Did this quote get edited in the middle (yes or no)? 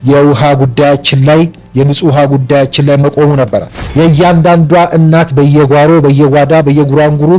yes